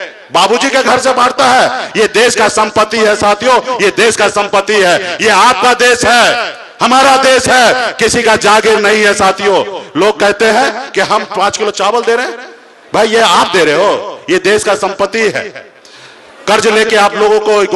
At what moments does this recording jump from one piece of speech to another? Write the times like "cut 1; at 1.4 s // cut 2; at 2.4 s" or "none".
none